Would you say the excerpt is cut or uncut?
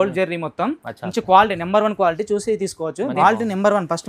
cut